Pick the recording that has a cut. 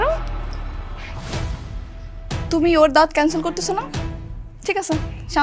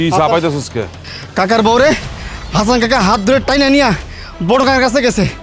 second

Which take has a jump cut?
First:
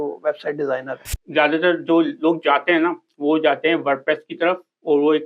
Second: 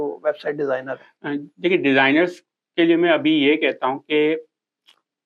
first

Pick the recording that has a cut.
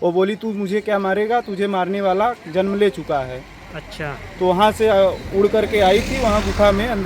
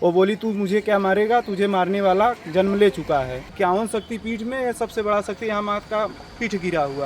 second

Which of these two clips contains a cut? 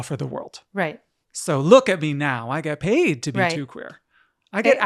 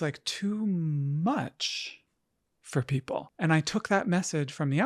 second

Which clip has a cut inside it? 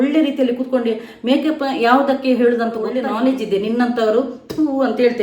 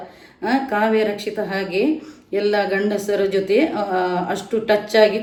first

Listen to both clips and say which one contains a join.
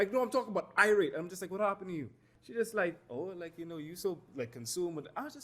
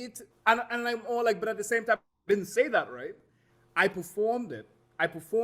first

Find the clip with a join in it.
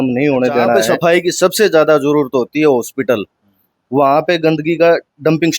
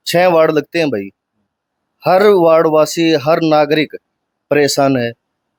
first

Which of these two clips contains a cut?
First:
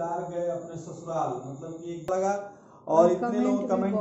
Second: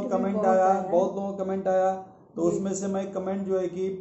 first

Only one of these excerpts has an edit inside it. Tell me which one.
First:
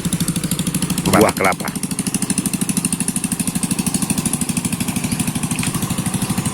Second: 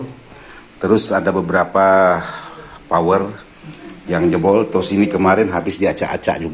first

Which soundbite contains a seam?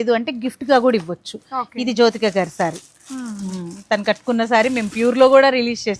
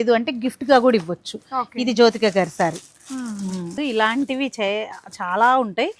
second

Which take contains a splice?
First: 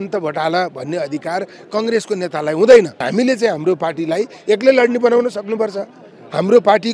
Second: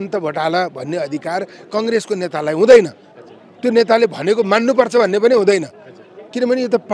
first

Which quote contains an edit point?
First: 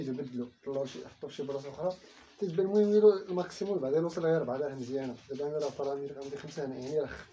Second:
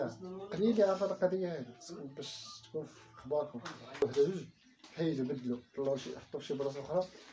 second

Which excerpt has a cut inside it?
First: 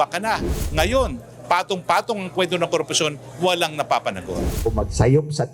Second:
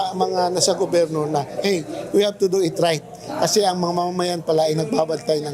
first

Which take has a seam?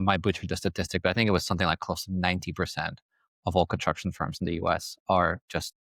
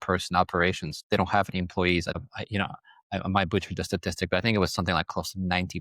second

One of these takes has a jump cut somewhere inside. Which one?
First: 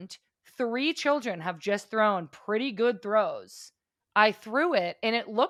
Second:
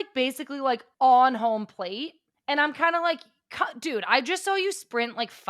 second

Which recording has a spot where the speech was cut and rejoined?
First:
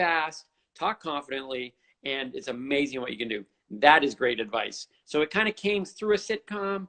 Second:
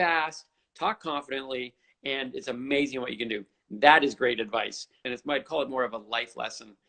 second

